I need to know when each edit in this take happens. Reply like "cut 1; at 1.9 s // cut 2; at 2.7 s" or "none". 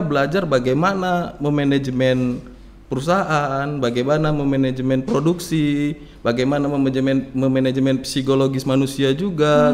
none